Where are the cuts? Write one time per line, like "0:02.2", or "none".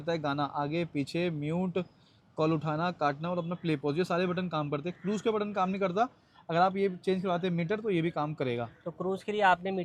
none